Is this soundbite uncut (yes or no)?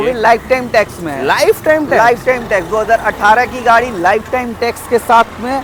yes